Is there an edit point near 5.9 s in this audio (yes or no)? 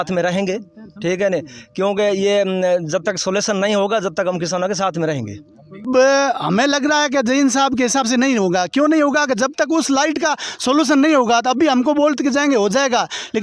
yes